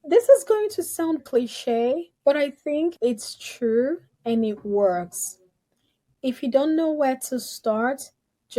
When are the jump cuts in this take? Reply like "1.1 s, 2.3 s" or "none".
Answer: 1.2 s